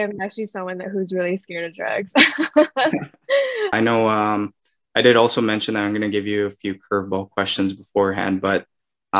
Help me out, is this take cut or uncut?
cut